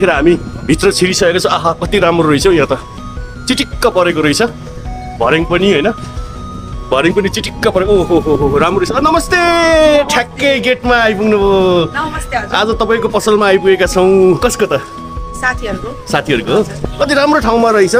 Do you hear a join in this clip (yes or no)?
yes